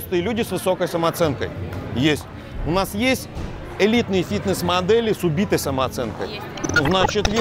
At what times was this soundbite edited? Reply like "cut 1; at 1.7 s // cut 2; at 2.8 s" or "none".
none